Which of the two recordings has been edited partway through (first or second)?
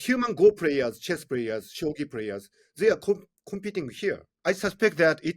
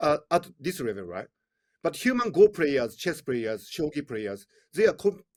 first